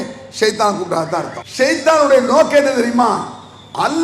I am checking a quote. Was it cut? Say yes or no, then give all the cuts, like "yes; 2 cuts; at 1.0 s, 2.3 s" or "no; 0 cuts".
yes; 1 cut; at 1.4 s